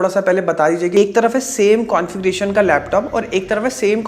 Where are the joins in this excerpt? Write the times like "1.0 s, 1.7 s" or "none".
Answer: 1.0 s